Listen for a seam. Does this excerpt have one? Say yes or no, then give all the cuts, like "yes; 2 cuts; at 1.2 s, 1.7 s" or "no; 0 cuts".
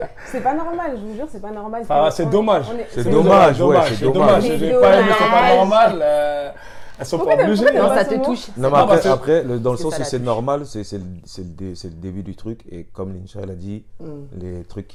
no; 0 cuts